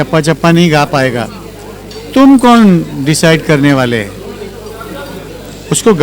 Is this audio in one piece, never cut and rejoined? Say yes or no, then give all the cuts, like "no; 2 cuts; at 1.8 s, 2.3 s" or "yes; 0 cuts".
yes; 0 cuts